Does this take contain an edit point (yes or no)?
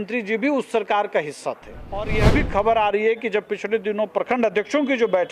yes